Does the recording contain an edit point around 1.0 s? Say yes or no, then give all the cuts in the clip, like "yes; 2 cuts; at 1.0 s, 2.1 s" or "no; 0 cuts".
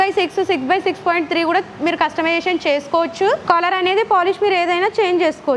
no; 1 cut; at 3.4 s